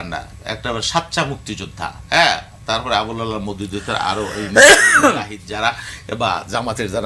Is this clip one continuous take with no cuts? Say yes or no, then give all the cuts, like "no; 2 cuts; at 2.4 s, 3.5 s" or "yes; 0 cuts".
yes; 0 cuts